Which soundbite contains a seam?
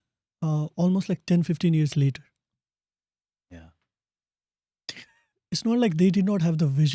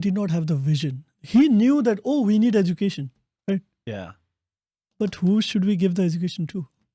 first; 1 cut; at 5.2 s

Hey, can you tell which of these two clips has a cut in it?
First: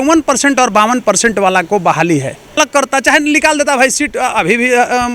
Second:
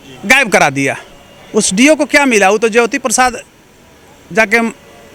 first; 1 cut; at 2.6 s

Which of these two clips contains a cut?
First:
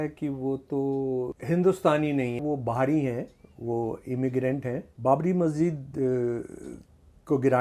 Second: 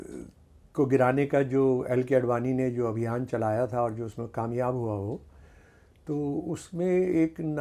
first; 3 cuts; at 1.4 s, 2.4 s, 4.9 s

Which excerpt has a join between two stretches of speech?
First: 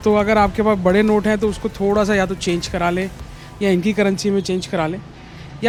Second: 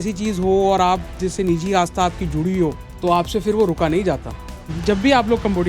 second; 1 cut; at 4.7 s

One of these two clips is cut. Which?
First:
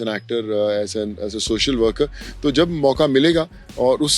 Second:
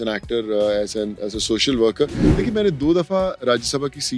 second; 1 cut; at 2.2 s

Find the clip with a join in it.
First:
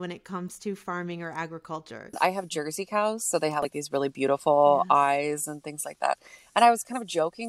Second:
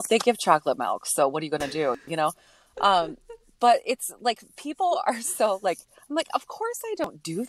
first; 1 cut; at 2.2 s

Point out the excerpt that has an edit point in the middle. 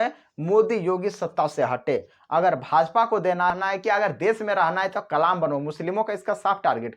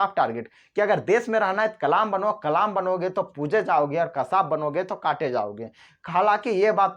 first; 1 cut; at 3.5 s

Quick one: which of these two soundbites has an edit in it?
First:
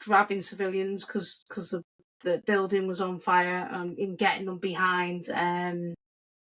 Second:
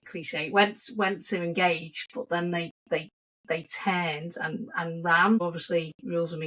second; 1 cut; at 5.4 s

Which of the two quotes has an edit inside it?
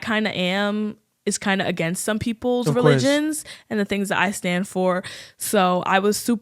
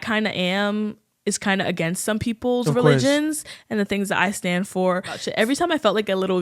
second; 1 cut; at 5.2 s

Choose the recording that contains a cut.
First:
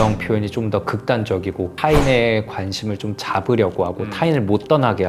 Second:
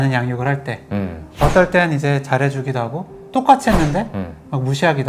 first; 1 cut; at 1.8 s

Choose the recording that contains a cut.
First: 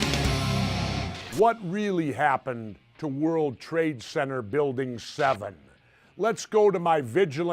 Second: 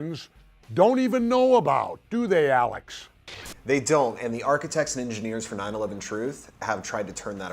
first; 1 cut; at 1.0 s

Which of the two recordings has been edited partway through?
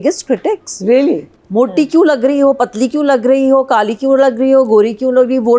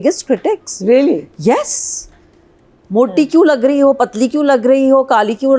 first; 1 cut; at 1.3 s

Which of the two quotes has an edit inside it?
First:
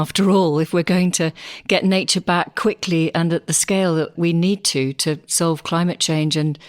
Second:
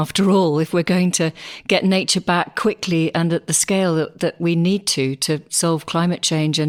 first; 1 cut; at 4.1 s

